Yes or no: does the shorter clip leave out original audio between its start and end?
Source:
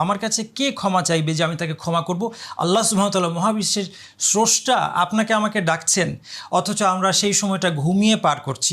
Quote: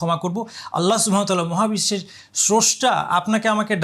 no